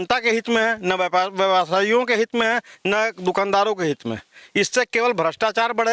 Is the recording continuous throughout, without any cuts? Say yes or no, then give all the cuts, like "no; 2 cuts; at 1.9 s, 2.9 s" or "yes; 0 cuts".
yes; 0 cuts